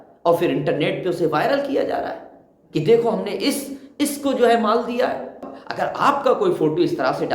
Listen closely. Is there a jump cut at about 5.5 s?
yes; 1 cut; at 5.5 s

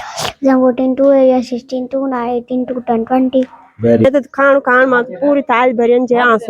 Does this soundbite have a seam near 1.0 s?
no; 1 cut; at 4.0 s

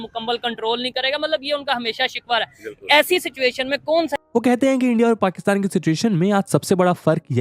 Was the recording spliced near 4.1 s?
yes; 1 cut; at 4.1 s

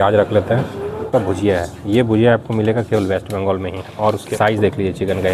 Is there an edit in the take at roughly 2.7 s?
no; 2 cuts; at 1.1 s, 4.3 s

